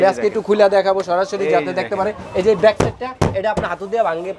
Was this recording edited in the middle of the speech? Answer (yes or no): no